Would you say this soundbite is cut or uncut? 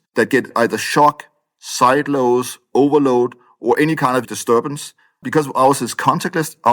uncut